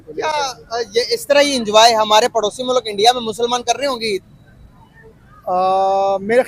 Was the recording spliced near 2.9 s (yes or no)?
no